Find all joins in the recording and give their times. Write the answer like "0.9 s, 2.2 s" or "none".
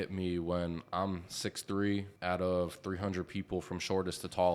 2.1 s